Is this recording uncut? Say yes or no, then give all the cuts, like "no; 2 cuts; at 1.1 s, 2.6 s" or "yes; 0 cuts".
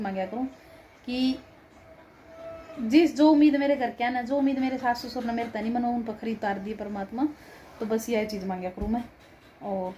yes; 0 cuts